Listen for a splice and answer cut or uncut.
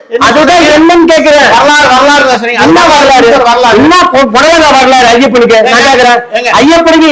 uncut